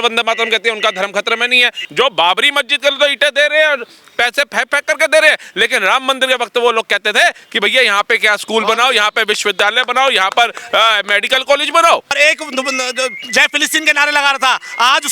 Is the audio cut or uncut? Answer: cut